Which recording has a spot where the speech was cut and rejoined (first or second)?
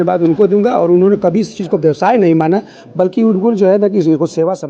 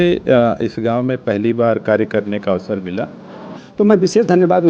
second